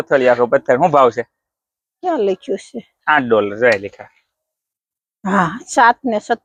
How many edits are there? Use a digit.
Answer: 0